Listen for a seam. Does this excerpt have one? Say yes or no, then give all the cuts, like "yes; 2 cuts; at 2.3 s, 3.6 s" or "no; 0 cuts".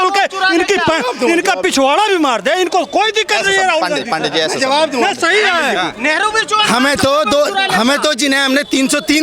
no; 0 cuts